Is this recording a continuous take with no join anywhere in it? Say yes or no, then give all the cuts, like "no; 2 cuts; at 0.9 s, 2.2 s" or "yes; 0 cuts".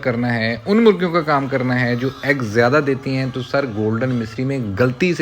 yes; 0 cuts